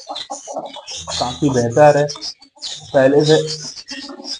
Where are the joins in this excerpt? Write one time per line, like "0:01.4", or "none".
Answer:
none